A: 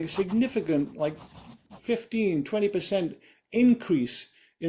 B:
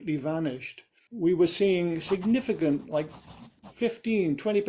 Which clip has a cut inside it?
B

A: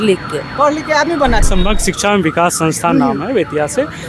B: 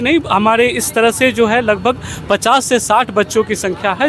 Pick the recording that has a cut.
A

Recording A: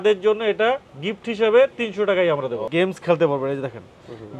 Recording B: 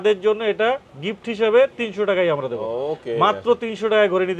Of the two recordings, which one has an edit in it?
A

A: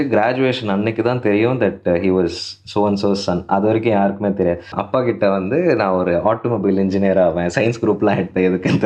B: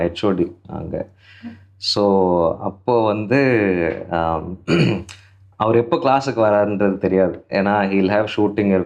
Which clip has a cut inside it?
A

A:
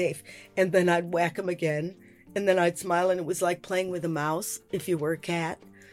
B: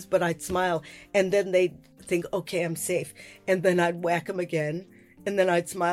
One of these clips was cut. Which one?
B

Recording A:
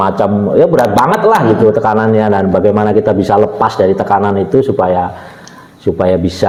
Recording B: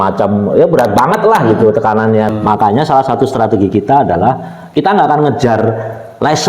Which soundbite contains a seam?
B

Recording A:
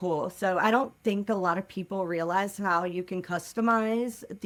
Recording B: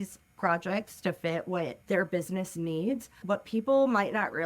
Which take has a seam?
B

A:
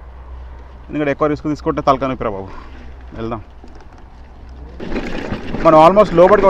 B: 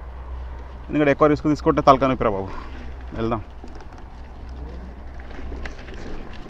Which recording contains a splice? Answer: A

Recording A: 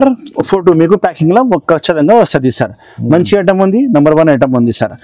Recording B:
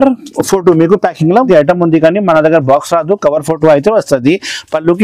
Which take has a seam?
B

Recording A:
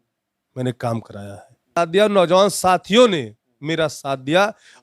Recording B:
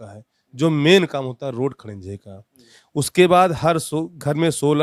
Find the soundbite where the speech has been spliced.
A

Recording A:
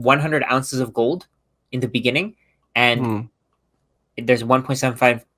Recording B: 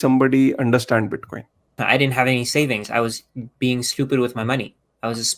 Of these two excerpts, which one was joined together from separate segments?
B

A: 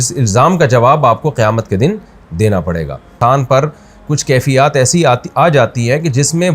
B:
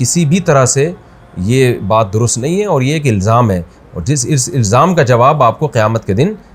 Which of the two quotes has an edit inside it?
A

